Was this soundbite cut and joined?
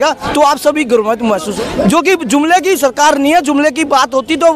yes; 1 cut; at 1.6 s

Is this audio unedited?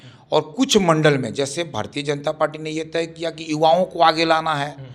yes; 0 cuts

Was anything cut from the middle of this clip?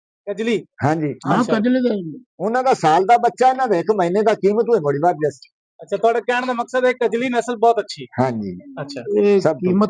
no; 0 cuts

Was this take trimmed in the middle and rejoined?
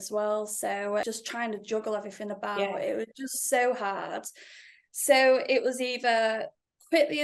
yes; 1 cut; at 1.0 s

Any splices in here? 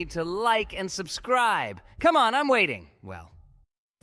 no; 0 cuts

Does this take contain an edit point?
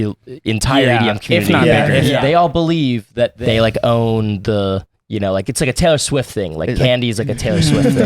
yes; 2 cuts; at 2.2 s, 3.4 s

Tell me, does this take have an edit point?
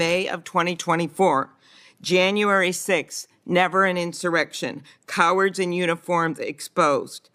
no; 0 cuts

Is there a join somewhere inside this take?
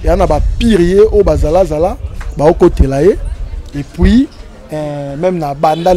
no; 0 cuts

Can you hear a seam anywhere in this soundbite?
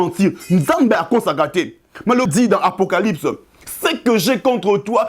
yes; 1 cut; at 2.3 s

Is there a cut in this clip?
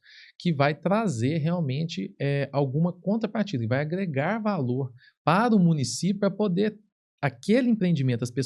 no; 0 cuts

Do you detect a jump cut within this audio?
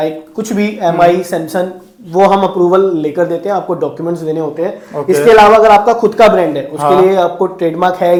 no; 0 cuts

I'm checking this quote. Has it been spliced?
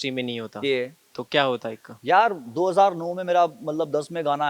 no; 0 cuts

